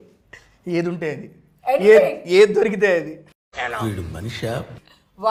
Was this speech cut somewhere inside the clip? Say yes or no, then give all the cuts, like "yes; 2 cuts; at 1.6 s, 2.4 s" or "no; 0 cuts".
no; 0 cuts